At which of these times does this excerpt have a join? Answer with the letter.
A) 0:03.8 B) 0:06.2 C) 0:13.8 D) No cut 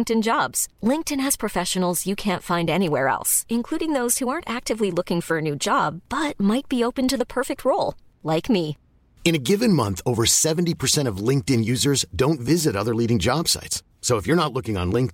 D